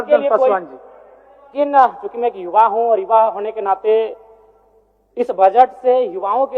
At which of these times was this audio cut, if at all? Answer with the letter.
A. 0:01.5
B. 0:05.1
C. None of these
A